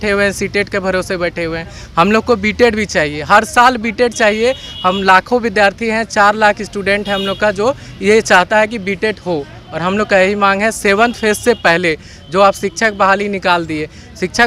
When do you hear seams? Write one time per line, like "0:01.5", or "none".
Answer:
none